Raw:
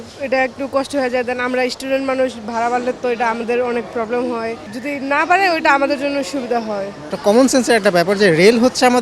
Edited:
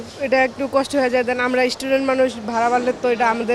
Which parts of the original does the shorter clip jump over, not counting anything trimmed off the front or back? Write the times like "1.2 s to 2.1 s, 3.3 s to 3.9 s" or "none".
none